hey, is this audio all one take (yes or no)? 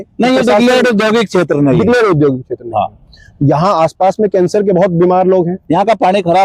yes